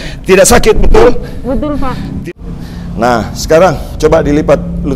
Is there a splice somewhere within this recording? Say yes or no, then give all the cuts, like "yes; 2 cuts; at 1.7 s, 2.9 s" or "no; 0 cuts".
yes; 1 cut; at 2.3 s